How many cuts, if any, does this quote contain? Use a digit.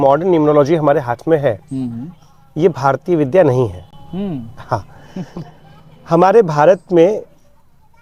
0